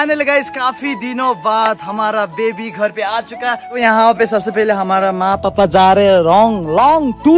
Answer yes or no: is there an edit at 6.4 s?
no